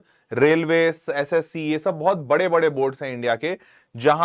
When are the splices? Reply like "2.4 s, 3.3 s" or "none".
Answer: none